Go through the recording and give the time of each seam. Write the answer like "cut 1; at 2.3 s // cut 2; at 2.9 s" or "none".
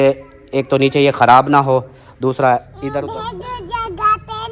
cut 1; at 3.0 s